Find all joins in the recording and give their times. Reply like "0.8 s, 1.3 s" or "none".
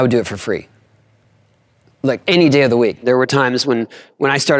3.0 s